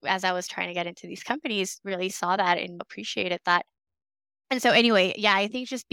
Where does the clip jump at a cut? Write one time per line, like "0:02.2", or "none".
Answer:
none